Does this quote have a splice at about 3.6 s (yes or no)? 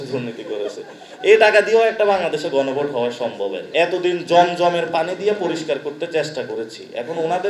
yes